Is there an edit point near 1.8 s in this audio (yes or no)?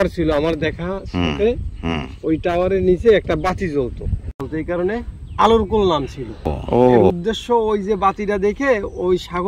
no